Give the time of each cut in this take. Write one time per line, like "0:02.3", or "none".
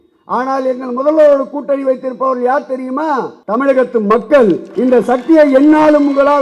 0:03.4
0:04.7